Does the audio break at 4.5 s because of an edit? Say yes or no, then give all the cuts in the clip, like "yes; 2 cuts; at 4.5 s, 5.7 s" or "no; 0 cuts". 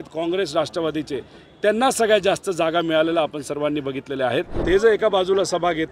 yes; 1 cut; at 4.5 s